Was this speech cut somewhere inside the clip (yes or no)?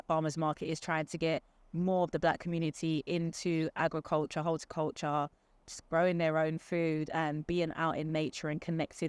no